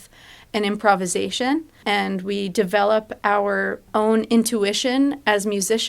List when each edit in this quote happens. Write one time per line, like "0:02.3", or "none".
0:01.8
0:03.9